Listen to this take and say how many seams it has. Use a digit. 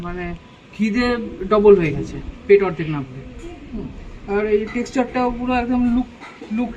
0